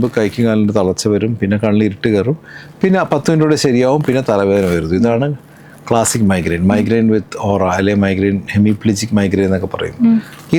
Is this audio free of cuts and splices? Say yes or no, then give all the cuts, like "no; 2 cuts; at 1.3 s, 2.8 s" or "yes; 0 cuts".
yes; 0 cuts